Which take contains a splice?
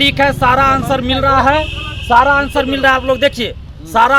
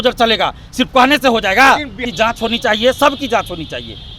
second; 1 cut; at 2.0 s

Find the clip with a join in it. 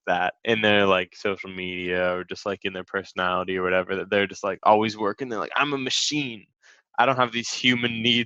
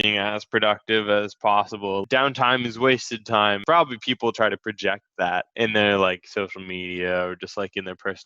second; 2 cuts; at 2.0 s, 3.6 s

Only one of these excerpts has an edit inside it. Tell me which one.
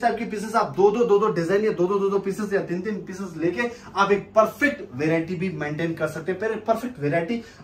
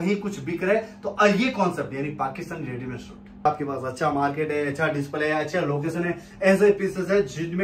second; 1 cut; at 3.4 s

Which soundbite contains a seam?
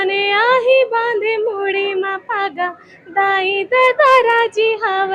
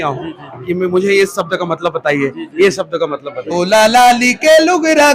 second; 1 cut; at 3.4 s

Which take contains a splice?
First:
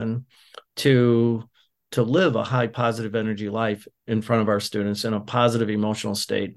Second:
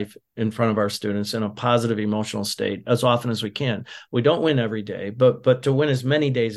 first; 2 cuts; at 1.8 s, 2.7 s

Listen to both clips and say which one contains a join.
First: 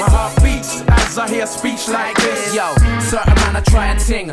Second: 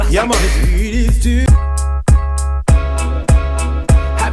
second; 1 cut; at 1.5 s

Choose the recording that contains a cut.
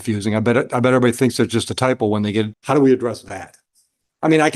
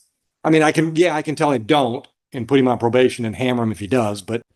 first; 1 cut; at 2.6 s

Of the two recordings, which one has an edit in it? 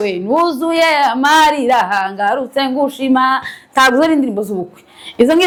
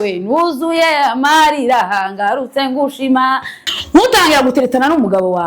second; 1 cut; at 3.6 s

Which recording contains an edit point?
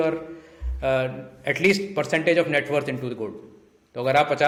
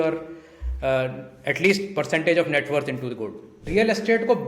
second; 1 cut; at 3.6 s

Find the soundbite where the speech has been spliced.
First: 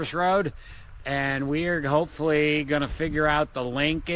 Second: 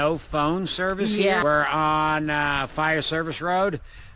second; 1 cut; at 1.4 s

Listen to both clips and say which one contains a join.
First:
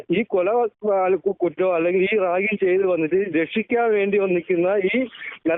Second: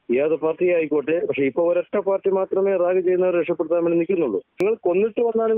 second; 1 cut; at 4.6 s

